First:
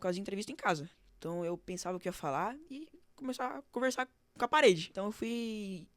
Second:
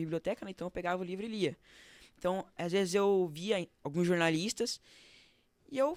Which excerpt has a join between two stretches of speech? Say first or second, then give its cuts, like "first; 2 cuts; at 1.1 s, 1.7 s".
first; 1 cut; at 4.9 s